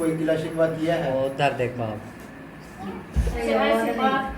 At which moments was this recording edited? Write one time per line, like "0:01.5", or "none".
0:03.4

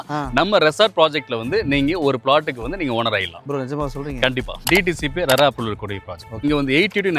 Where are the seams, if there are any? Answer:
0:04.6
0:06.4

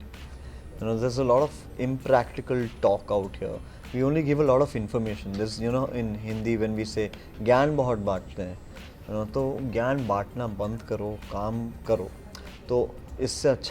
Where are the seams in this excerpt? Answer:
none

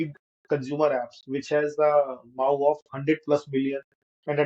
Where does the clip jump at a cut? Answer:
none

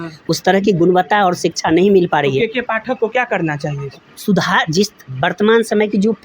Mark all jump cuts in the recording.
none

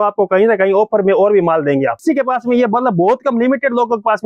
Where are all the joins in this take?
0:02.0

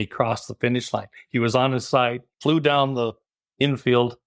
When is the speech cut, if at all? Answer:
0:02.3

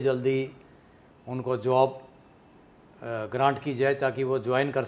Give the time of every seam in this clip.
none

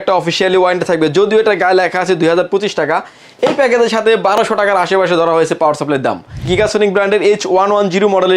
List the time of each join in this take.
0:06.5

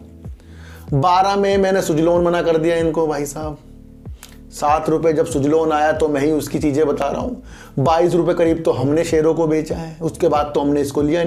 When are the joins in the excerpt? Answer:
none

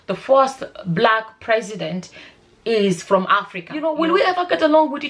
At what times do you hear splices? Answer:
0:03.8

